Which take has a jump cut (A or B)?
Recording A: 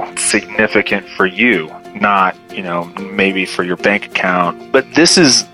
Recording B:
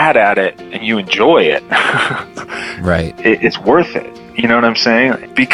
A